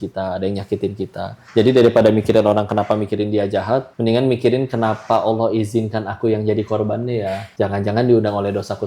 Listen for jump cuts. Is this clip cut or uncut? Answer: cut